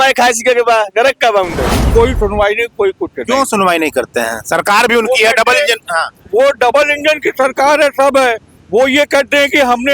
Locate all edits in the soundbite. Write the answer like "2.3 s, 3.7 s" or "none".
1.9 s